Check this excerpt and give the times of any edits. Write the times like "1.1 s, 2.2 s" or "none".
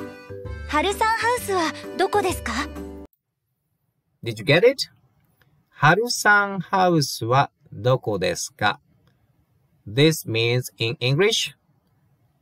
none